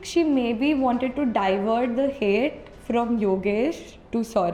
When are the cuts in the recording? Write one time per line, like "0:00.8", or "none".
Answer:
none